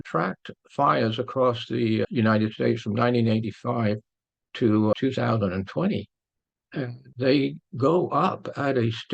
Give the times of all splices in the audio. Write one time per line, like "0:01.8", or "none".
0:02.1
0:04.9
0:07.0